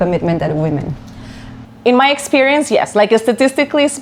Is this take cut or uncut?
uncut